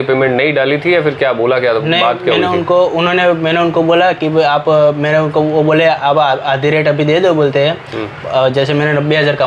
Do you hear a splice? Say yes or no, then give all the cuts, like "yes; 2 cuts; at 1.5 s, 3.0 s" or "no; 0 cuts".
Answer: no; 0 cuts